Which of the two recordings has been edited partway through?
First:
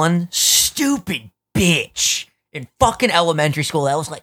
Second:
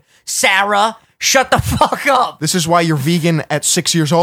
second; 1 cut; at 2.4 s

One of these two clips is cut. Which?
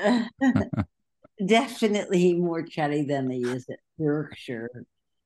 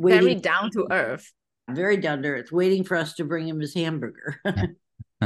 second; 1 cut; at 1.7 s

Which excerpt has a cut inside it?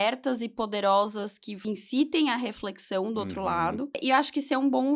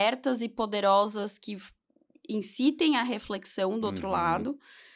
first; 2 cuts; at 1.5 s, 4.0 s

